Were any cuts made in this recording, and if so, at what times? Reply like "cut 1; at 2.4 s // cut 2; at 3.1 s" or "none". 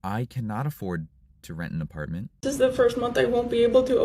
cut 1; at 2.3 s